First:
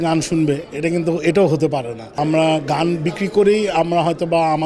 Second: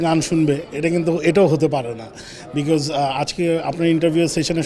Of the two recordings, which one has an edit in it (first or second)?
first